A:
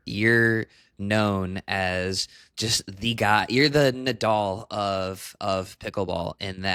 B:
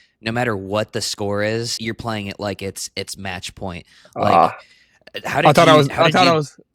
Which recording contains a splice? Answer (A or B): B